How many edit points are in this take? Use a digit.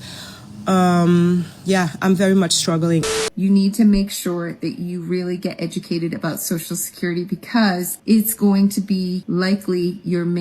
1